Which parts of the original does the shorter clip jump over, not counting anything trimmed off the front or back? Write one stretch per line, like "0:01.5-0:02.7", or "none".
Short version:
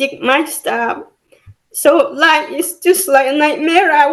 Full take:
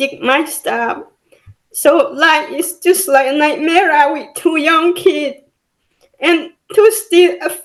none